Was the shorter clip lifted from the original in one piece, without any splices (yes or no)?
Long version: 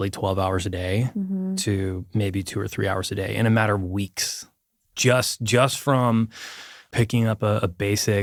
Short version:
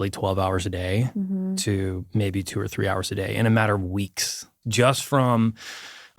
no